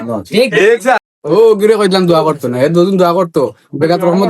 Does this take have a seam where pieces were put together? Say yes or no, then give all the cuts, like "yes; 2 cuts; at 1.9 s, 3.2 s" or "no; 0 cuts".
yes; 1 cut; at 1.0 s